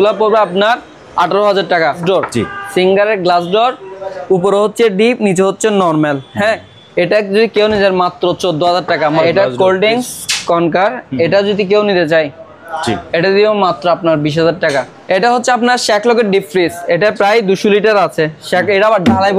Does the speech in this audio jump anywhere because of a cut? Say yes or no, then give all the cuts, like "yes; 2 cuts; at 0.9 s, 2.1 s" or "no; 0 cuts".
yes; 3 cuts; at 2.0 s, 9.2 s, 14.9 s